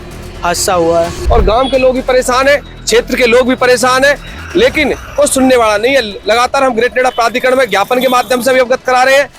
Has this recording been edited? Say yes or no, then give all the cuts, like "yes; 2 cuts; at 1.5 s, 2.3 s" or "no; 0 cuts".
yes; 1 cut; at 1.2 s